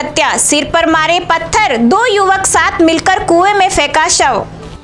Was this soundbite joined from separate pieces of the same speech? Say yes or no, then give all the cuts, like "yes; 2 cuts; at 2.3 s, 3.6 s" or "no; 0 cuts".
no; 0 cuts